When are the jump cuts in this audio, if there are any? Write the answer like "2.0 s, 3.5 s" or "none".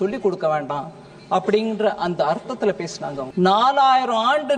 3.3 s